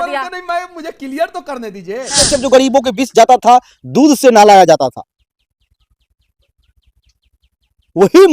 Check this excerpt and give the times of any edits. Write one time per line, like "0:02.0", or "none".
0:02.3